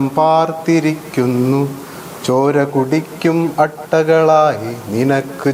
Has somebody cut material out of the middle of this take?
no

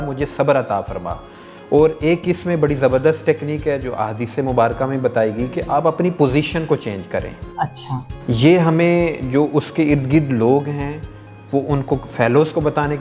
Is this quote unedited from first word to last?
yes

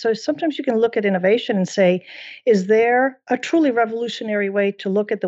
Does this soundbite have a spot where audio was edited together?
yes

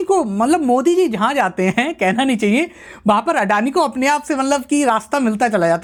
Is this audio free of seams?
yes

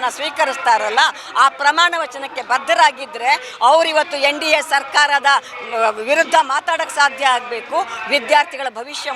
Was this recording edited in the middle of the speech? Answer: no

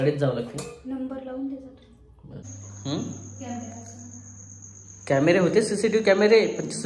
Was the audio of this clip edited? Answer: yes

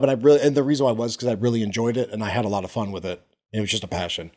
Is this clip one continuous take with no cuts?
yes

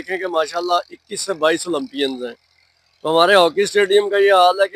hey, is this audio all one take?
yes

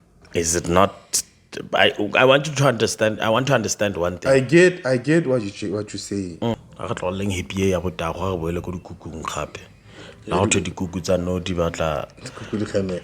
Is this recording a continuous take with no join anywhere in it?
no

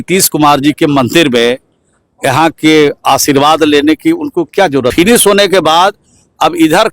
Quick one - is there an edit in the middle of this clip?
yes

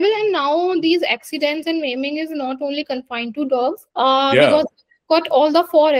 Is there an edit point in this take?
no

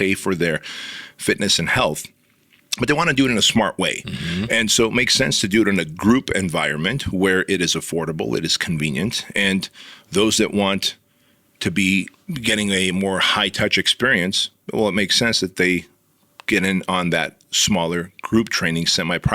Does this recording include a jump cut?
yes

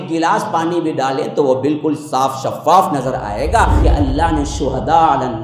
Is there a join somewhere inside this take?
yes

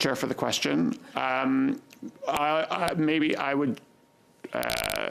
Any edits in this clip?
no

